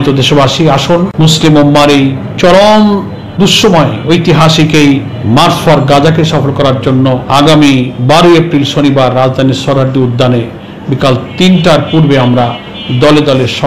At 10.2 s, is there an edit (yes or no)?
no